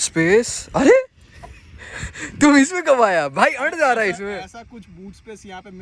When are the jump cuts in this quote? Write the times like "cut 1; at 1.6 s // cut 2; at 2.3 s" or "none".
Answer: none

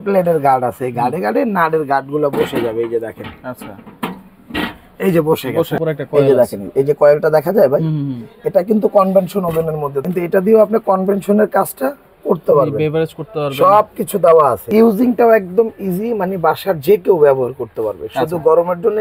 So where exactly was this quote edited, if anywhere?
cut 1; at 5.8 s // cut 2; at 10.0 s // cut 3; at 14.6 s

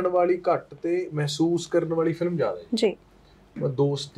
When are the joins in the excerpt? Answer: none

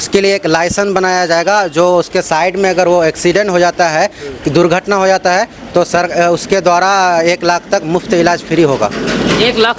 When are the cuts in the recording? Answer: none

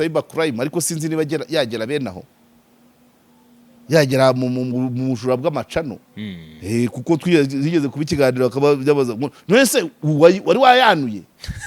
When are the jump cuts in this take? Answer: none

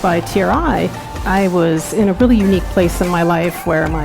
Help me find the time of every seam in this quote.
cut 1; at 1.1 s

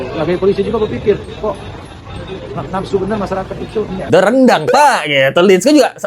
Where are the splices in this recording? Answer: cut 1; at 4.0 s

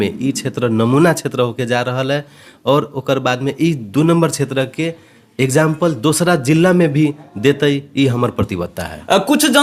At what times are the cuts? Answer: none

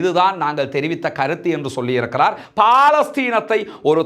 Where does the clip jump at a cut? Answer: cut 1; at 2.4 s

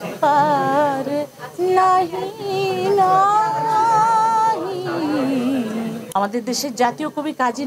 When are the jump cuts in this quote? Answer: cut 1; at 6.0 s

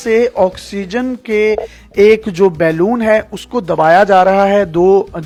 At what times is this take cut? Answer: none

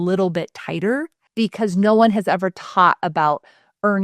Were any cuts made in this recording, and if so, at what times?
cut 1; at 1.2 s

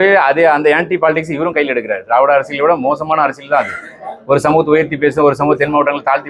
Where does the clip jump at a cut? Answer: none

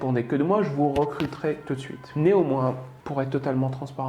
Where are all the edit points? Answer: cut 1; at 2.0 s // cut 2; at 2.9 s

